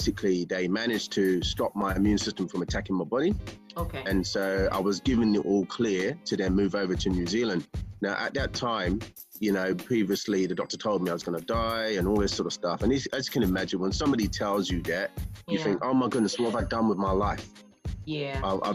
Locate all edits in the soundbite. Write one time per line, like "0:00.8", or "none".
none